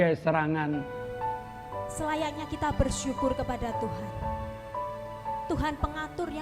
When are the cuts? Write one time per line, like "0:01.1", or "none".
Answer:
0:01.0

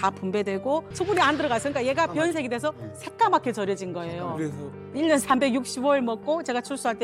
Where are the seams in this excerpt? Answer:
0:00.9

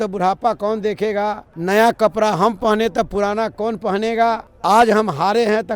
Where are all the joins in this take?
0:01.5
0:04.5

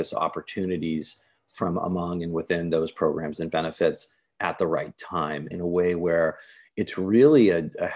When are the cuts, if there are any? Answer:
0:05.5

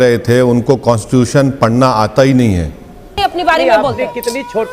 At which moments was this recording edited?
0:03.2

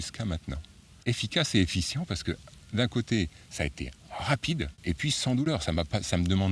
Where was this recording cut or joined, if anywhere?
0:01.0
0:04.8

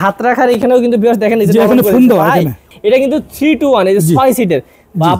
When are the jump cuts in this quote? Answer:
0:02.7

